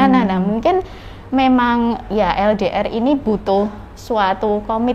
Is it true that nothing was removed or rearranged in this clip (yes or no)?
yes